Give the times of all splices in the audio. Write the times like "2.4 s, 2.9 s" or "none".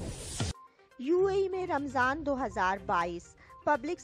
1.0 s